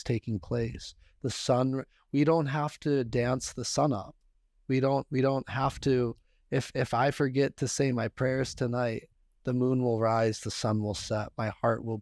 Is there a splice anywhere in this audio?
no; 0 cuts

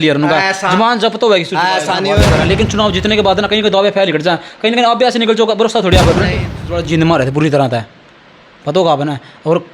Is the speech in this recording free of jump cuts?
no; 2 cuts; at 2.2 s, 6.3 s

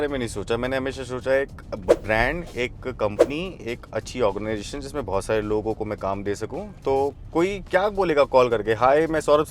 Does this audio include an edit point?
no; 0 cuts

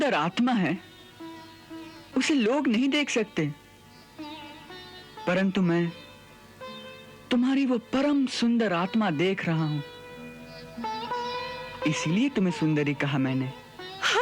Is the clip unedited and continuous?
yes; 0 cuts

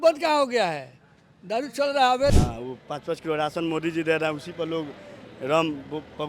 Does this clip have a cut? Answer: yes; 1 cut; at 2.4 s

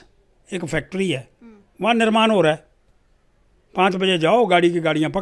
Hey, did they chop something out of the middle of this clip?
no; 0 cuts

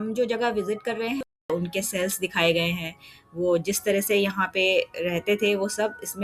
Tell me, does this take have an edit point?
yes; 1 cut; at 1.5 s

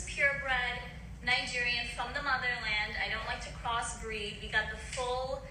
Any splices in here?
no; 0 cuts

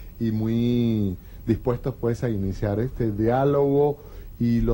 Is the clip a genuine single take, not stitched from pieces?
no; 1 cut; at 2.0 s

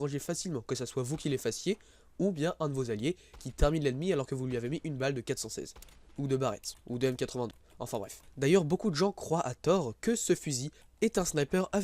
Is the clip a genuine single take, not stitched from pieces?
no; 1 cut; at 7.9 s

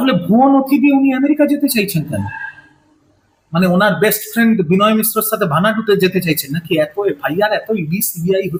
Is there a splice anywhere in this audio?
no; 0 cuts

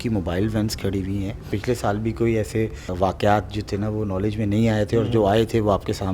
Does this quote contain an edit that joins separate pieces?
yes; 2 cuts; at 1.5 s, 2.9 s

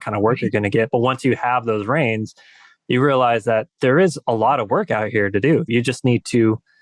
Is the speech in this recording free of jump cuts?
no; 1 cut; at 5.7 s

